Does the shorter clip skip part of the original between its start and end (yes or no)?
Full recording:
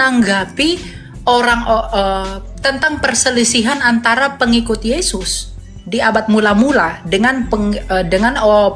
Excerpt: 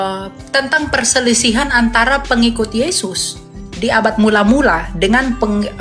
no